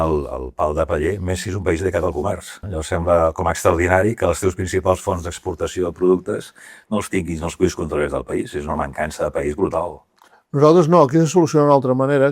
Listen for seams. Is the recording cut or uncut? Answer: cut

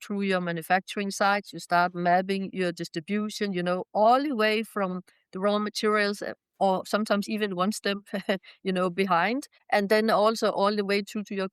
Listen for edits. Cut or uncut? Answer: cut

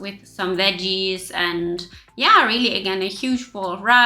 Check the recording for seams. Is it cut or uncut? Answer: uncut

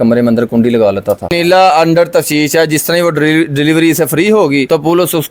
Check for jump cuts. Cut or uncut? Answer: cut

